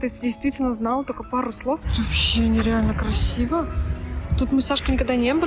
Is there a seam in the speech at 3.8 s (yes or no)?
no